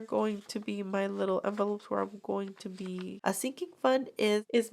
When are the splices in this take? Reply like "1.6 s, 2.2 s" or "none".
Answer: 3.1 s